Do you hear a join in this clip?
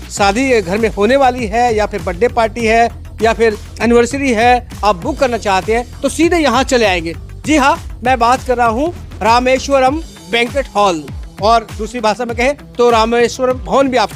no; 0 cuts

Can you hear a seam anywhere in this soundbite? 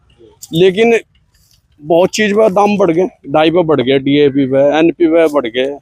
no; 0 cuts

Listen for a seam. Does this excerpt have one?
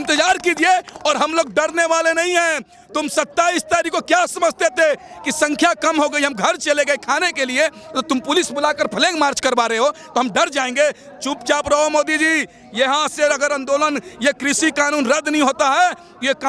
no; 0 cuts

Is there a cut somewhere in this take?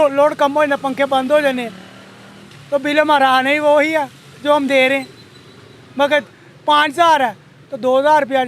no; 0 cuts

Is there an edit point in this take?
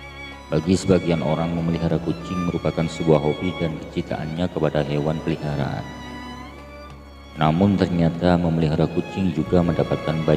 no; 0 cuts

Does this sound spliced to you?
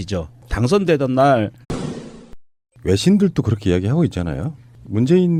no; 0 cuts

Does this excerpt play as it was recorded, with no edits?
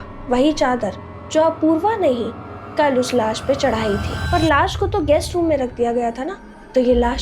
no; 1 cut; at 4.1 s

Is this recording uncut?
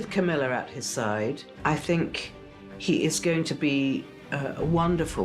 no; 1 cut; at 1.5 s

